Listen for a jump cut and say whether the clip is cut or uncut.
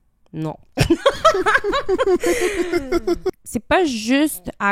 cut